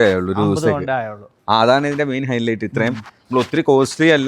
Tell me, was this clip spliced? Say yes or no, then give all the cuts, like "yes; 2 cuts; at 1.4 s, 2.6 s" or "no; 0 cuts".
no; 0 cuts